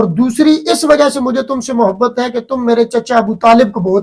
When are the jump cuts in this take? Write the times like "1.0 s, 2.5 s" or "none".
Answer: none